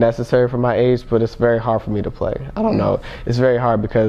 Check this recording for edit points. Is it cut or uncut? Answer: uncut